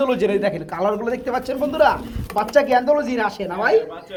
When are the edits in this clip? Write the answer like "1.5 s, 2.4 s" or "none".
none